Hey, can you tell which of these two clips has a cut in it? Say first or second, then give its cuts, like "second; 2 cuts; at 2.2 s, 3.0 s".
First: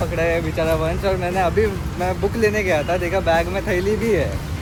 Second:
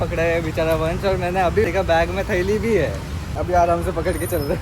second; 2 cuts; at 1.7 s, 3.4 s